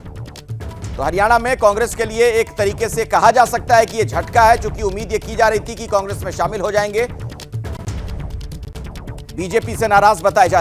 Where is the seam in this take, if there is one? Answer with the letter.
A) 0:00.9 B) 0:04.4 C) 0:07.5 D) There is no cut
A